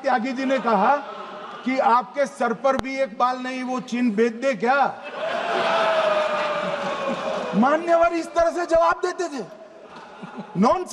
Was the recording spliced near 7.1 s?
no; 0 cuts

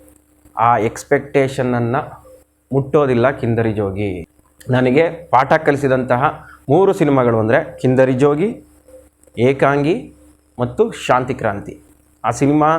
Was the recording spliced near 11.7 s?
yes; 2 cuts; at 4.2 s, 11.7 s

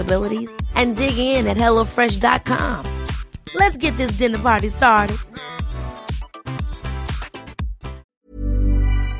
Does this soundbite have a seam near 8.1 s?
yes; 1 cut; at 8.1 s

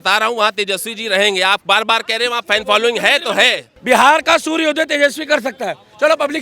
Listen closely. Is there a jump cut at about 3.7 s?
yes; 1 cut; at 3.7 s

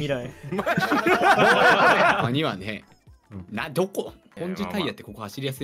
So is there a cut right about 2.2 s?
yes; 2 cuts; at 2.2 s, 4.2 s

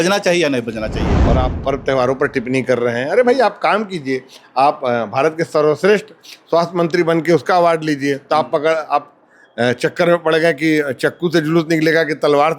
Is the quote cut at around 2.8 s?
no; 1 cut; at 1.1 s

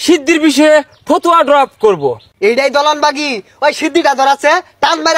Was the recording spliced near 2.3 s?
yes; 1 cut; at 2.3 s

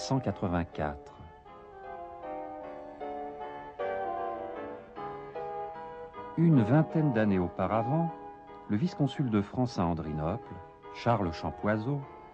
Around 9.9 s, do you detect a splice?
yes; 1 cut; at 9.9 s

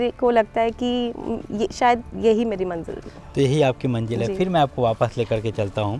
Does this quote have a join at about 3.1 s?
no; 0 cuts

